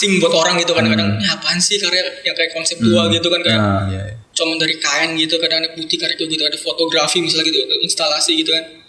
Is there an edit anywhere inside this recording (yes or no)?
no